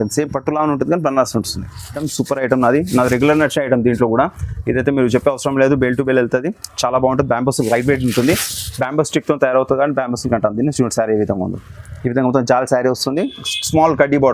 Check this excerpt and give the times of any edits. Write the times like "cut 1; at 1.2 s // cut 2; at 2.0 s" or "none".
cut 1; at 2.0 s